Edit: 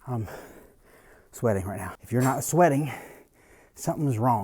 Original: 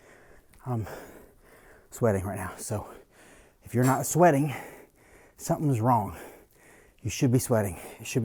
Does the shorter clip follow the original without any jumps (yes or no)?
no